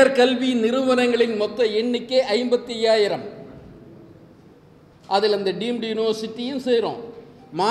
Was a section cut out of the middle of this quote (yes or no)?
no